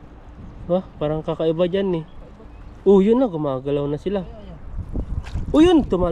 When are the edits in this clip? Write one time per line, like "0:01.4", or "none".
none